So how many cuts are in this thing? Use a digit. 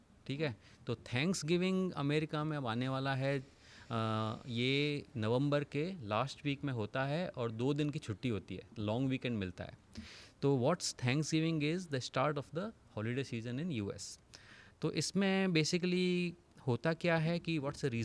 0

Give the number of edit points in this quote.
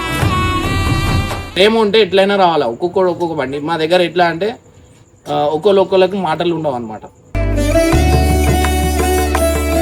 1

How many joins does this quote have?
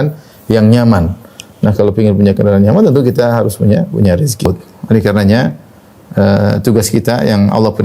1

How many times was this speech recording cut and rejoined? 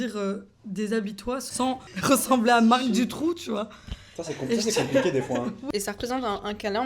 2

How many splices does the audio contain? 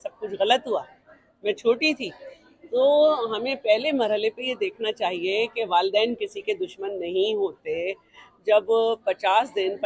0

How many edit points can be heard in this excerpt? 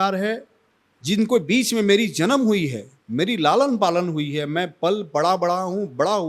0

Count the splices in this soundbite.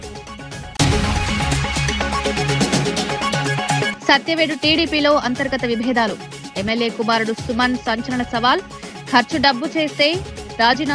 3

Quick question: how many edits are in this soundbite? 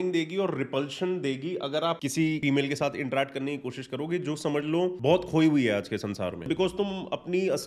3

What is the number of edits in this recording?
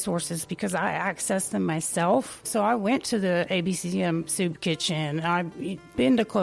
0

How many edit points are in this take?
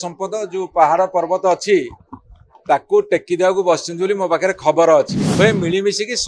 1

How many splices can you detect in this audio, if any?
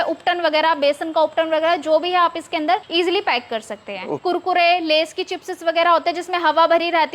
2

